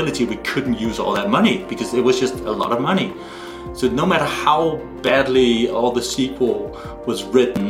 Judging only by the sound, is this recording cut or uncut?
uncut